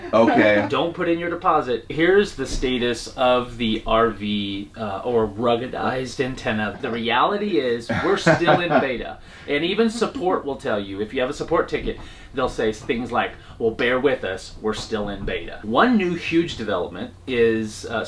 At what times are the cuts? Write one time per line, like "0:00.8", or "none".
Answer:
0:01.9
0:06.7
0:15.6

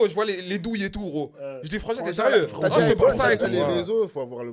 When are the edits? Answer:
0:03.4

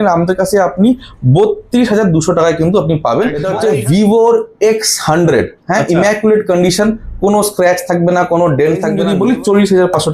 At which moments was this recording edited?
0:03.5
0:09.0

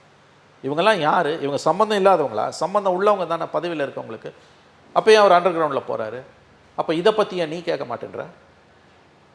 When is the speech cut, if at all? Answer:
none

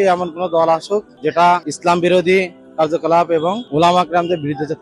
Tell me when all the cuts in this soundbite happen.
0:01.1
0:01.7
0:03.6

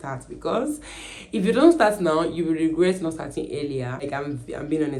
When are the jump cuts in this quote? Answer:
none

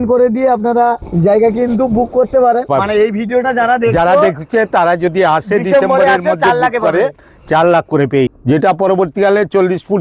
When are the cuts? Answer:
0:01.1
0:02.7
0:08.3

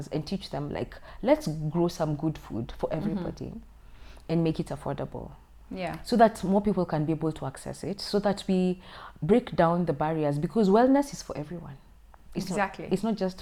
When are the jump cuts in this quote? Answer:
none

